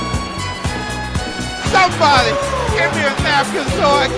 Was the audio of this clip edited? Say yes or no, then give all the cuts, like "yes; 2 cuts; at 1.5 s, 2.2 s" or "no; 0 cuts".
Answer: no; 0 cuts